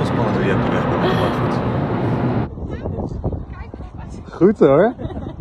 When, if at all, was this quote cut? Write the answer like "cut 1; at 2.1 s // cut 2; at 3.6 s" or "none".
cut 1; at 2.5 s